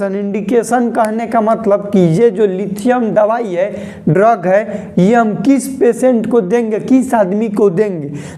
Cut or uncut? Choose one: uncut